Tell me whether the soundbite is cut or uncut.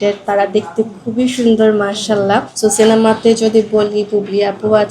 cut